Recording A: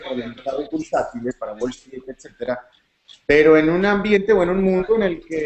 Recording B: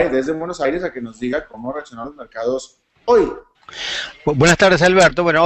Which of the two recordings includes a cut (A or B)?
A